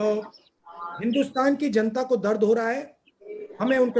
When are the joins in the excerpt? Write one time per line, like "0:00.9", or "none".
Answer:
none